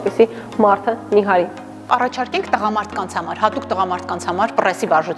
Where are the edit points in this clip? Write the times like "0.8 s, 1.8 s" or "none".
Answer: 1.9 s